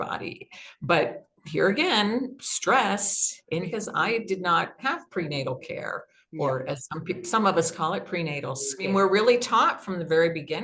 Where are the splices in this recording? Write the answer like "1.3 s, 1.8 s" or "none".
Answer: 3.7 s, 8.9 s